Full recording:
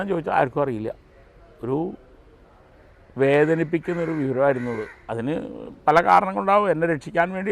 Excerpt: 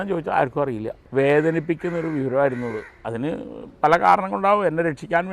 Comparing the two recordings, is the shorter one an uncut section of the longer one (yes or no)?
no